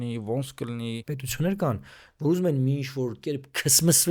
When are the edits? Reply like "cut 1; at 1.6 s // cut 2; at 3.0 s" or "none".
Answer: cut 1; at 1.0 s